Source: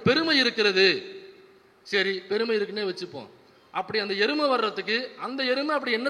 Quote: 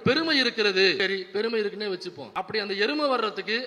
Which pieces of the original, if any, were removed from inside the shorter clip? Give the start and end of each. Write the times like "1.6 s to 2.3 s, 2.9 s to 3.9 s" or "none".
1.0 s to 1.9 s, 3.1 s to 3.6 s